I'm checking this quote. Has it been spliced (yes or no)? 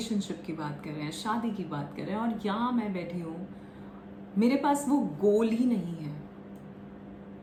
no